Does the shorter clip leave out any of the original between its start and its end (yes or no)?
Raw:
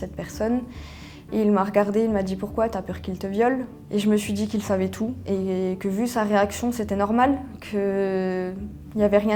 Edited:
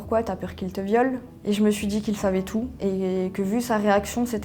no